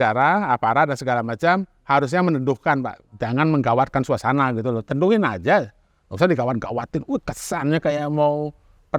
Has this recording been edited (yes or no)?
no